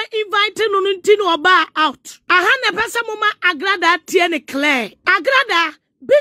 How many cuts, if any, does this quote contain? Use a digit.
2